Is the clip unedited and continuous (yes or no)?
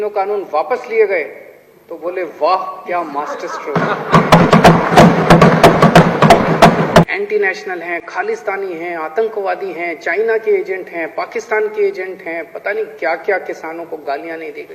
no